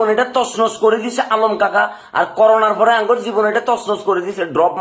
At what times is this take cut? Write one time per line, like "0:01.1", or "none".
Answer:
none